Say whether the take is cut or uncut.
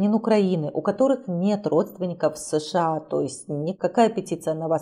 uncut